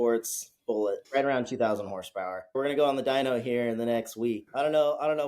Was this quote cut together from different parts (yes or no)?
yes